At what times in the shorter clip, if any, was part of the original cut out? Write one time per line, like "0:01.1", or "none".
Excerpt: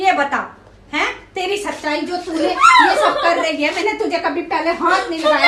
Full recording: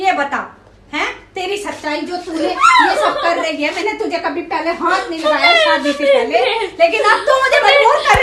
none